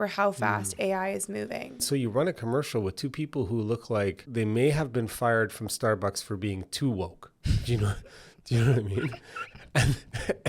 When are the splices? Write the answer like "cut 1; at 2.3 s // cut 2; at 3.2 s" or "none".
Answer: cut 1; at 1.8 s